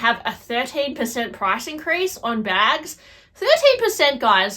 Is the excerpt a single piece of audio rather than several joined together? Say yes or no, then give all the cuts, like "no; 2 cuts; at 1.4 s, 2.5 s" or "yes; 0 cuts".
yes; 0 cuts